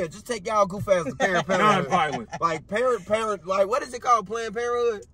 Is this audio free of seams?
yes; 0 cuts

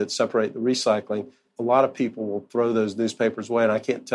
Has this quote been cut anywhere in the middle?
yes; 1 cut; at 1.5 s

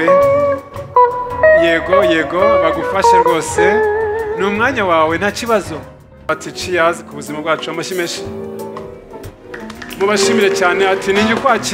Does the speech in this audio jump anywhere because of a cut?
yes; 1 cut; at 6.2 s

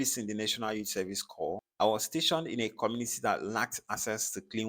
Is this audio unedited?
no; 1 cut; at 1.6 s

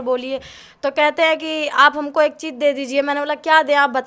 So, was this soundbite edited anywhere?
no; 0 cuts

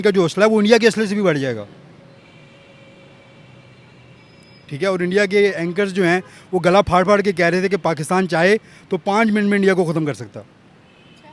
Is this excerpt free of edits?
yes; 0 cuts

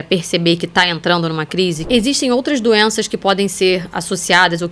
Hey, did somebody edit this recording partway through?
yes; 1 cut; at 1.8 s

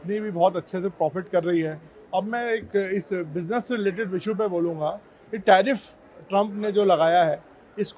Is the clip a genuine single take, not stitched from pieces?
yes; 0 cuts

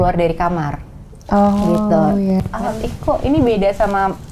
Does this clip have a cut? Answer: yes; 1 cut; at 2.4 s

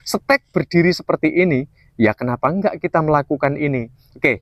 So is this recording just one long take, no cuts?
yes; 0 cuts

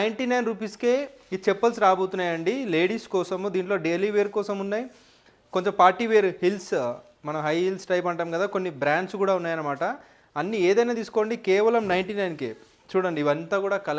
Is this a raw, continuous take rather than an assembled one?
yes; 0 cuts

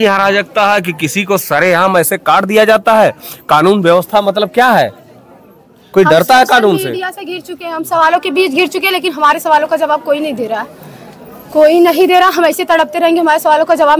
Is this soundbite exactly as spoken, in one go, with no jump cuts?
yes; 0 cuts

